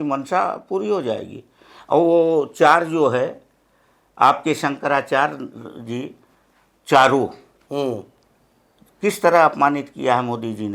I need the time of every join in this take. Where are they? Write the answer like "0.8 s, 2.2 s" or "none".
none